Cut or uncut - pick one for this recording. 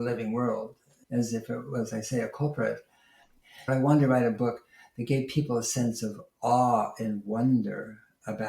cut